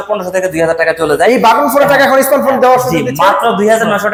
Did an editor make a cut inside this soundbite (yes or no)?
no